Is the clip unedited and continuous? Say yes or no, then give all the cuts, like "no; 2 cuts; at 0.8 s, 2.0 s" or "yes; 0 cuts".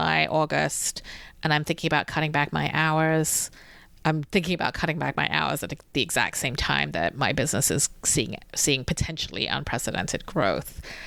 yes; 0 cuts